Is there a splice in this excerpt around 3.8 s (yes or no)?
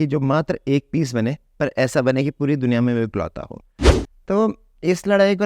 yes